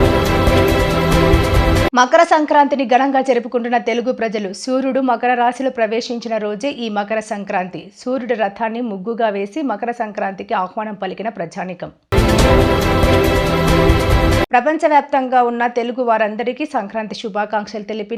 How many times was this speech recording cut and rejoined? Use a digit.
1